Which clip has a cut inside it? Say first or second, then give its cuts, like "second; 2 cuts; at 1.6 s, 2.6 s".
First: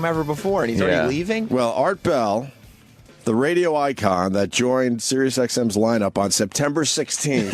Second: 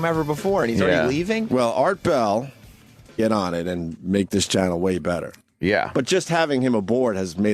first; 1 cut; at 3.2 s